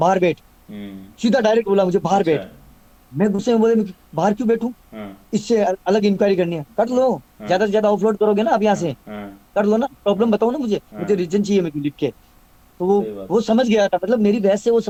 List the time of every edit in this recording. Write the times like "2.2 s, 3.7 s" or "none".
none